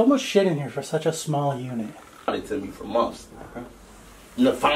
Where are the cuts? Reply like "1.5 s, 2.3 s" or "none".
2.1 s